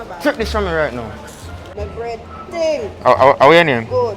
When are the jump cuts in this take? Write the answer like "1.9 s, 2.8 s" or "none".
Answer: 1.8 s